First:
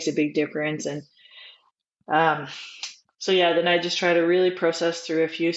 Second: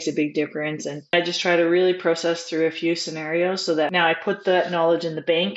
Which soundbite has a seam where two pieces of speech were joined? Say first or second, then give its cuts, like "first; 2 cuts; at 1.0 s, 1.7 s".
second; 2 cuts; at 1.1 s, 3.9 s